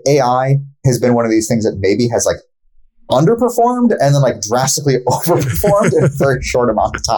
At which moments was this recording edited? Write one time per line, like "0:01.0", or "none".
none